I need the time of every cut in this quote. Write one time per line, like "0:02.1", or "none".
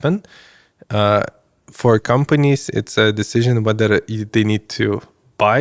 none